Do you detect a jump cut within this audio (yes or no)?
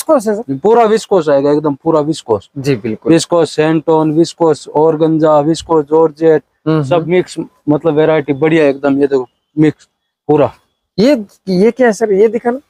no